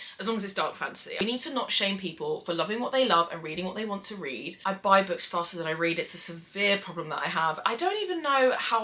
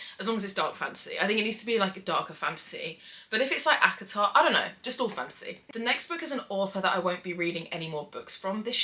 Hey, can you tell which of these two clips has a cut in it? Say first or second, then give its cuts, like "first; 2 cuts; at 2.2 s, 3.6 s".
first; 3 cuts; at 1.2 s, 4.5 s, 7.6 s